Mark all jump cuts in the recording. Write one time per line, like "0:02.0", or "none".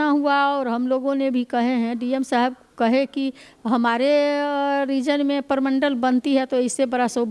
none